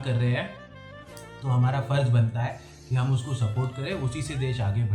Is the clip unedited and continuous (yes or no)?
yes